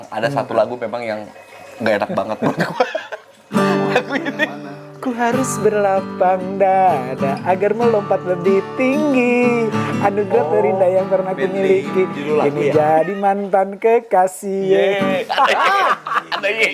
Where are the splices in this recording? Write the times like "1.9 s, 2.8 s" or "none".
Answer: none

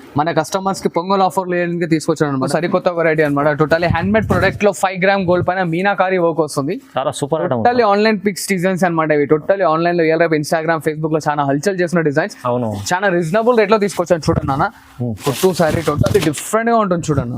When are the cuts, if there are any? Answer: 2.5 s, 15.2 s

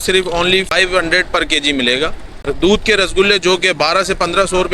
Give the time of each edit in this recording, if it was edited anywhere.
0.7 s, 2.3 s

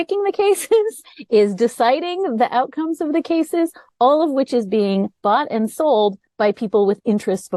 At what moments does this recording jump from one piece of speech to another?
none

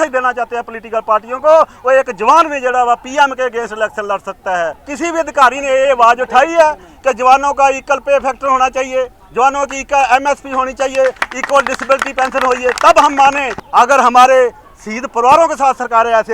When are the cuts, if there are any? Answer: 4.8 s, 13.5 s

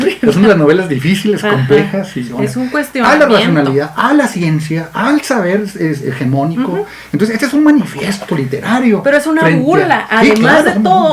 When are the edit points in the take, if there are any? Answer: 2.2 s

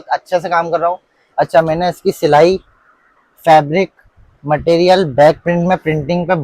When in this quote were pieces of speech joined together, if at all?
none

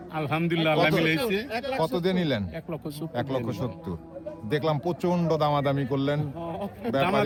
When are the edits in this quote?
none

